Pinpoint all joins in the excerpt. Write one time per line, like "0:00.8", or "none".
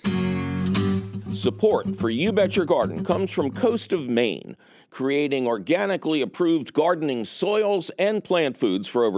0:01.3